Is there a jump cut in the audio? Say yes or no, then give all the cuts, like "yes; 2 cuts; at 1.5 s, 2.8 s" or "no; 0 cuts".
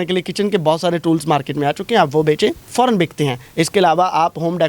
yes; 2 cuts; at 2.6 s, 3.4 s